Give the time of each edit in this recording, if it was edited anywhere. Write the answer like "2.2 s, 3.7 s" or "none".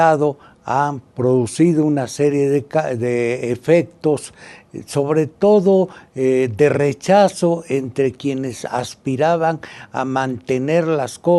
5.4 s